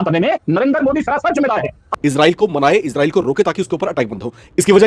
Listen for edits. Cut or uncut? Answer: cut